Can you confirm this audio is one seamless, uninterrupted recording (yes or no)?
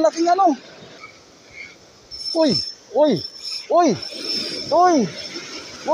no